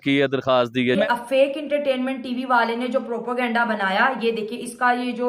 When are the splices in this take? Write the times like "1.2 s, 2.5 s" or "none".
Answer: 1.0 s